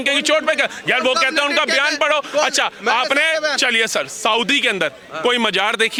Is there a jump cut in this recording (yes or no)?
no